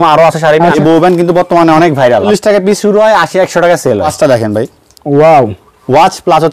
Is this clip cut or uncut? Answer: cut